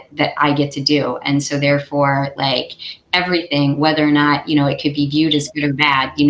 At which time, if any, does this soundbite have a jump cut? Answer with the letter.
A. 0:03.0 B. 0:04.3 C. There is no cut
C